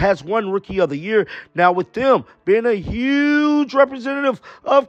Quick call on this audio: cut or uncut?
uncut